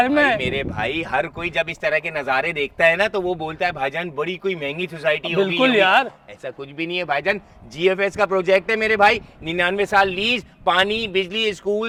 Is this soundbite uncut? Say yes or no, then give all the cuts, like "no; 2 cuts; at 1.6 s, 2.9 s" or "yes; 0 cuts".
yes; 0 cuts